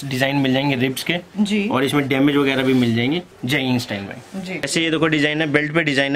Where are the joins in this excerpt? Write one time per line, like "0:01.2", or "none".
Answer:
0:04.7